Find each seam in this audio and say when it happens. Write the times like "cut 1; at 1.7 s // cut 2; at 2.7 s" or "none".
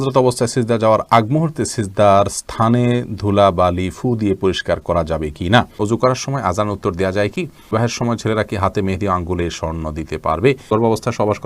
cut 1; at 5.7 s // cut 2; at 7.7 s // cut 3; at 10.7 s